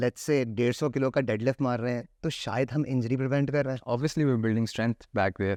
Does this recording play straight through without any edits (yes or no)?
yes